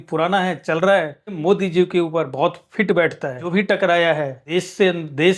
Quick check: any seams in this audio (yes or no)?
yes